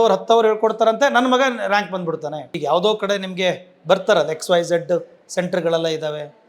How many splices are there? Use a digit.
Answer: 1